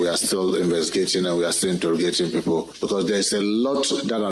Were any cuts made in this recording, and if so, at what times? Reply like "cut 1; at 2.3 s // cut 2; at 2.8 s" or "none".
cut 1; at 2.7 s